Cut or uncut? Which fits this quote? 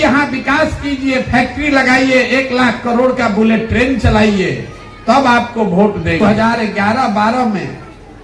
cut